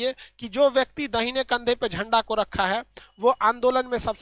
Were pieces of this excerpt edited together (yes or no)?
no